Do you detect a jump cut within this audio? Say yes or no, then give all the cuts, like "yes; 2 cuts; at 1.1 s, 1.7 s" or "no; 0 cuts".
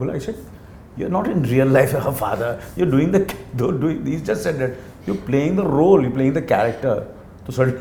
no; 0 cuts